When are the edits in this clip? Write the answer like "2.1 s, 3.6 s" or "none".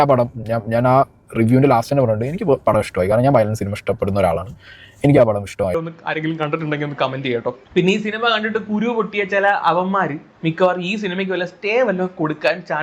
5.9 s